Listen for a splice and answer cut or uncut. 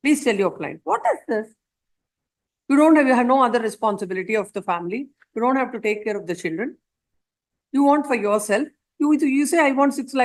uncut